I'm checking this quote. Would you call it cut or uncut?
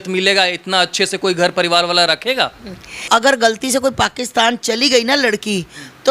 cut